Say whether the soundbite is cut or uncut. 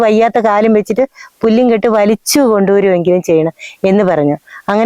uncut